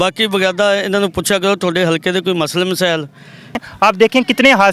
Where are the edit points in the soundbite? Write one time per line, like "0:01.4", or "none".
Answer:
0:03.7